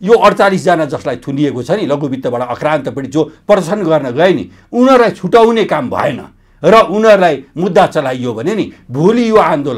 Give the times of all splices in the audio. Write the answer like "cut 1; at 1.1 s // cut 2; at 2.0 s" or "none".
none